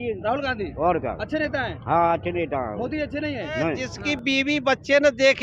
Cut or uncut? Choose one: cut